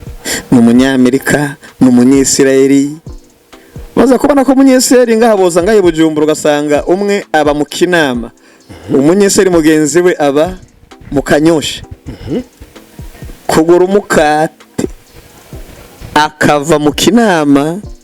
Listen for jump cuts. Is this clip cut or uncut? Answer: uncut